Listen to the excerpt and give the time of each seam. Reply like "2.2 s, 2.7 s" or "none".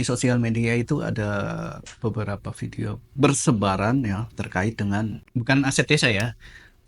5.3 s